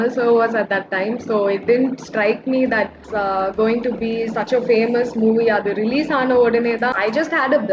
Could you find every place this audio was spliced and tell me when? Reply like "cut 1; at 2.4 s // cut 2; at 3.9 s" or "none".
cut 1; at 3.0 s // cut 2; at 6.9 s